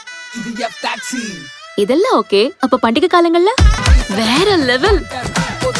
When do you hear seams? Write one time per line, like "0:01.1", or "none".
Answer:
0:03.8